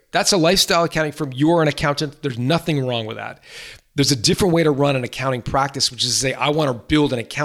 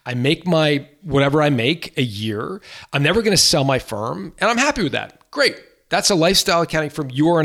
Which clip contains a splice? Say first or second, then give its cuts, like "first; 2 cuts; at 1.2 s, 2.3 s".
second; 1 cut; at 1.0 s